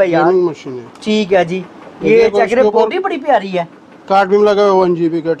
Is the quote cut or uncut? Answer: uncut